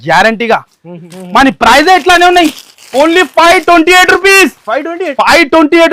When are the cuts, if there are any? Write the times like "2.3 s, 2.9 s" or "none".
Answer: 1.1 s

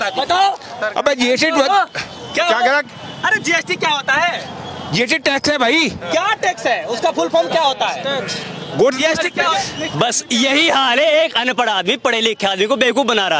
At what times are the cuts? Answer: 9.5 s

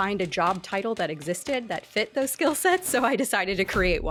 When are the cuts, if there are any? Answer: none

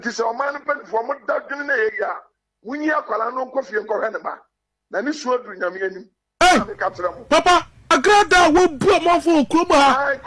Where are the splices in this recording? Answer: 7.9 s

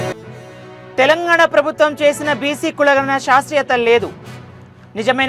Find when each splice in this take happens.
1.0 s

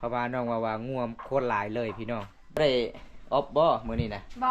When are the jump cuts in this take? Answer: 2.6 s

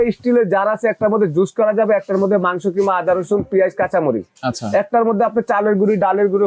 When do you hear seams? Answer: none

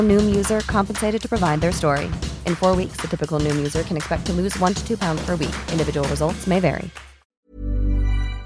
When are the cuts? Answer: 7.4 s

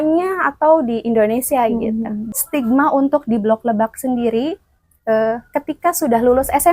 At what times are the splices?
2.3 s

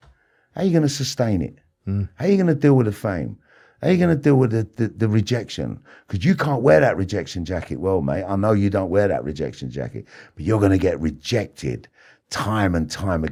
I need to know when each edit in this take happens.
none

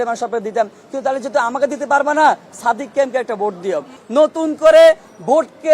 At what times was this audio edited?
3.9 s

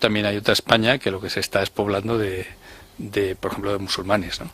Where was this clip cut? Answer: 3.2 s

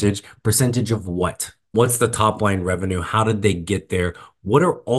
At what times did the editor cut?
1.7 s

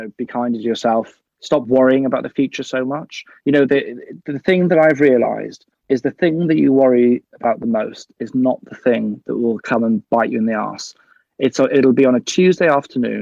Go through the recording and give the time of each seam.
1.3 s

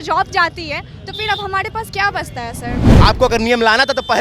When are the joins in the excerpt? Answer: 2.8 s

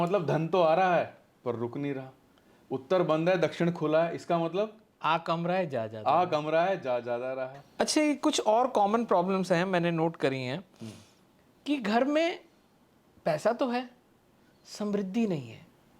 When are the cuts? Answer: 7.6 s

